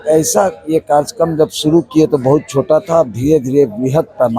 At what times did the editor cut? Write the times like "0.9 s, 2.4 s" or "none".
none